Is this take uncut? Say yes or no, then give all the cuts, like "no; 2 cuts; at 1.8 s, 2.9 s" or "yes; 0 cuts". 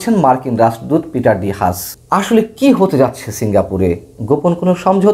no; 2 cuts; at 1.9 s, 4.1 s